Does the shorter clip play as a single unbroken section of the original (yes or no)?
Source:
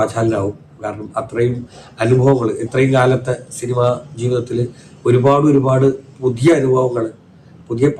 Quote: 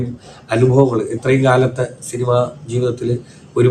yes